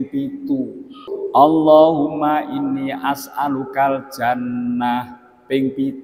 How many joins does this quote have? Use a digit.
1